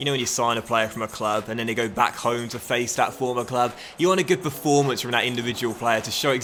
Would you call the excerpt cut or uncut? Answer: uncut